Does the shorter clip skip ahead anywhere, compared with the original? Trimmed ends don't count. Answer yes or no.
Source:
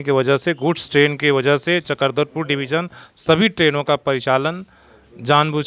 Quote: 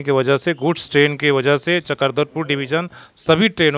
no